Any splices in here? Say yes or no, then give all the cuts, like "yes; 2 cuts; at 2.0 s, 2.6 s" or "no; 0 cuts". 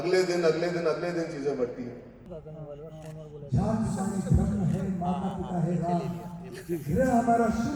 yes; 1 cut; at 2.3 s